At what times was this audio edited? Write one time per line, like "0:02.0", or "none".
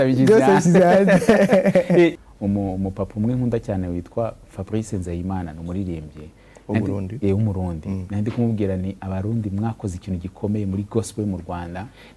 0:02.1